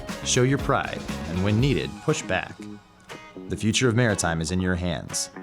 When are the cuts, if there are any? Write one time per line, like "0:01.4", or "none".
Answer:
0:02.5